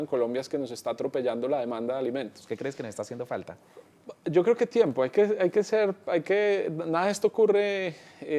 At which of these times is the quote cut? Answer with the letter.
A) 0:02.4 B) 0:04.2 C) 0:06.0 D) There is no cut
A